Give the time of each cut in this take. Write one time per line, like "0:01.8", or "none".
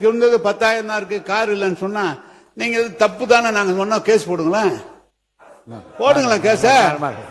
none